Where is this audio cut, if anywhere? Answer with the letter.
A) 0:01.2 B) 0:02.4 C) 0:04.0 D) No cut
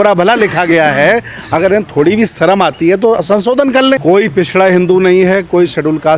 C